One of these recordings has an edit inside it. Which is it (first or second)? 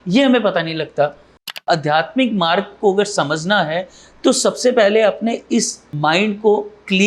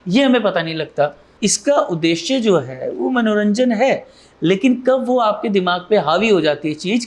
first